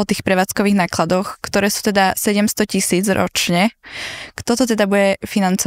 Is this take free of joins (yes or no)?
yes